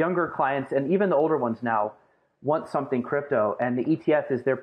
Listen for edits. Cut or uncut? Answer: uncut